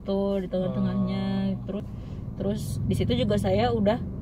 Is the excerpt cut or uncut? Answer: cut